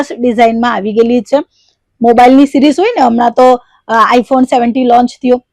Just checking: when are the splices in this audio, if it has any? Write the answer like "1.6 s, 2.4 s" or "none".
none

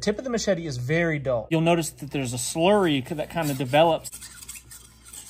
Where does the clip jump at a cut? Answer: 1.4 s, 4.1 s

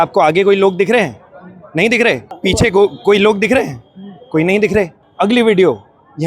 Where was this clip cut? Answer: 2.3 s, 5.0 s

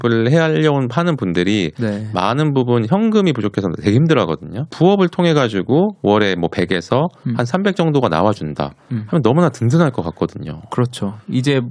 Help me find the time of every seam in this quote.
none

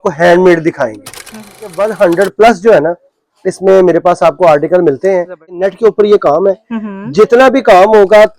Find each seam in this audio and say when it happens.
1.7 s, 5.6 s

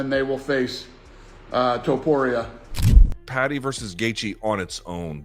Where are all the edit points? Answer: 2.8 s

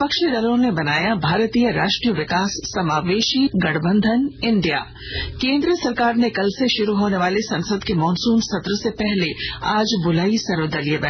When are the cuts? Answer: 3.5 s

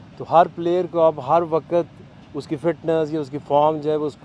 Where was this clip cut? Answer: none

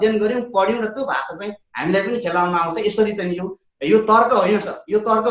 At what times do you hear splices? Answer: none

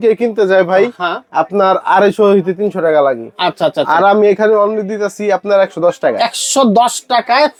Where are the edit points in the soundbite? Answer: none

